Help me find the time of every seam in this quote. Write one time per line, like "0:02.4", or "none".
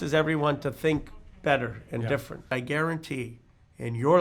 0:02.5